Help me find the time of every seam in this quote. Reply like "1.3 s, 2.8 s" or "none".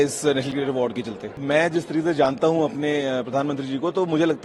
1.4 s